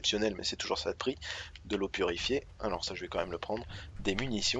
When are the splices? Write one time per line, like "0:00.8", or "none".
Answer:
none